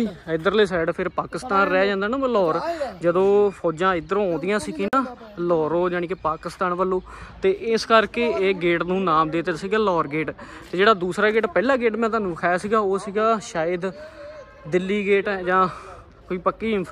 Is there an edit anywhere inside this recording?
no; 0 cuts

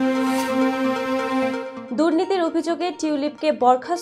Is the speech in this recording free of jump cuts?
yes; 0 cuts

